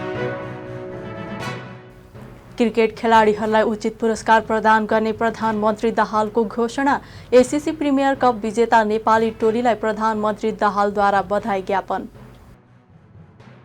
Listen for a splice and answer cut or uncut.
cut